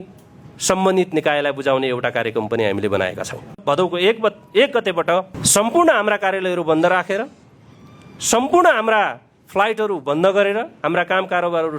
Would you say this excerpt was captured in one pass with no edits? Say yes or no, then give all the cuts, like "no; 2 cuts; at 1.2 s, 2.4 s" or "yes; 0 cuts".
no; 2 cuts; at 3.6 s, 5.4 s